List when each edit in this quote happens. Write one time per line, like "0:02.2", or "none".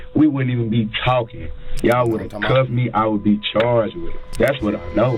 0:03.9